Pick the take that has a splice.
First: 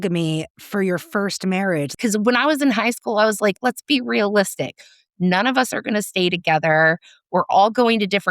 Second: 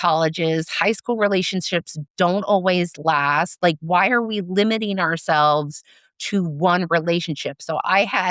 first; 1 cut; at 1.9 s

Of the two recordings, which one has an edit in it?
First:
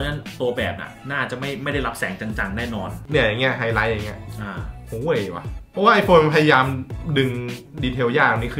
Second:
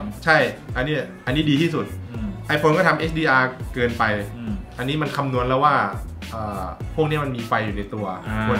first; 1 cut; at 3.0 s

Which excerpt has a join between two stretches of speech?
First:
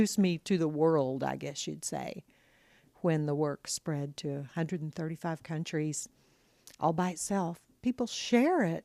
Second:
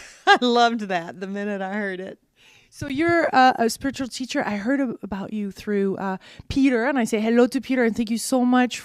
first; 1 cut; at 4.4 s

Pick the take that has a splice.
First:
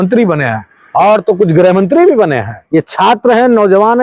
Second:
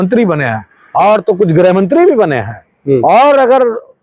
first; 1 cut; at 2.6 s

